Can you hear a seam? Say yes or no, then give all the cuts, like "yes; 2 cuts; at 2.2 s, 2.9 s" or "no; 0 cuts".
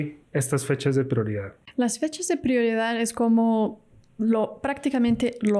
yes; 1 cut; at 1.6 s